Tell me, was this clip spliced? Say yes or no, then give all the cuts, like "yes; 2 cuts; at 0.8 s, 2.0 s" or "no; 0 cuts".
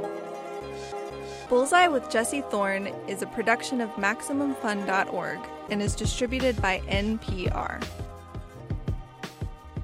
no; 0 cuts